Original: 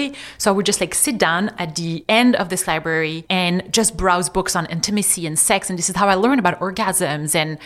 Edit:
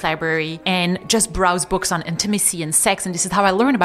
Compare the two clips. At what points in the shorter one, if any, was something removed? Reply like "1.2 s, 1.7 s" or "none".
none